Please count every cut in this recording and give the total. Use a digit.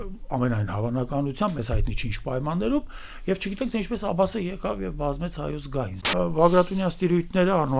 1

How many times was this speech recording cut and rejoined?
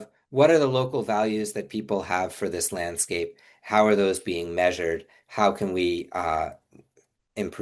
0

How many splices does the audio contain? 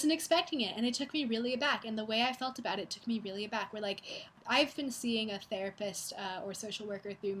1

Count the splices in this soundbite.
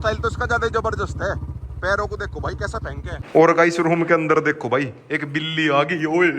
1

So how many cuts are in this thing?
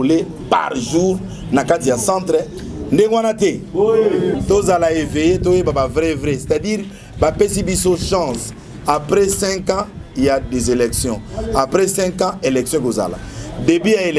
1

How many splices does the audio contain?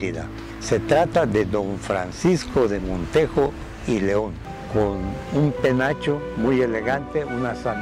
1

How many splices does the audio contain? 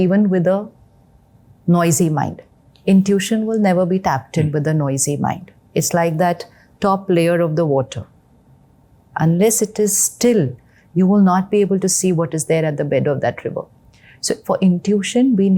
0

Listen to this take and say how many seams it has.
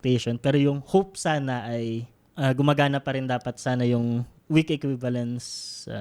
2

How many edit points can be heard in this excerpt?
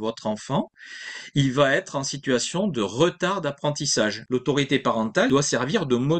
2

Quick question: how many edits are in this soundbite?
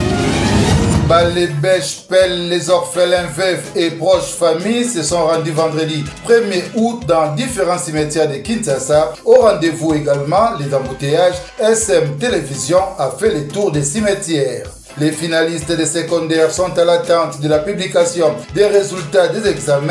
1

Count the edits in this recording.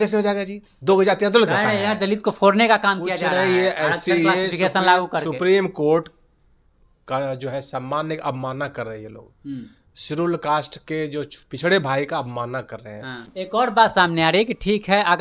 1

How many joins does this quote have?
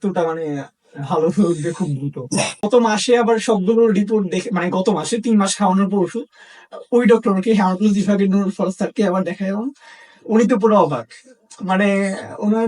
1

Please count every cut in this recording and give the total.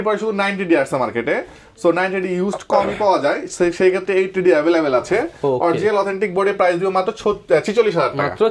0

